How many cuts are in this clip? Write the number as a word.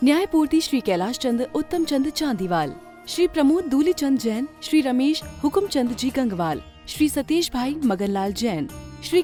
zero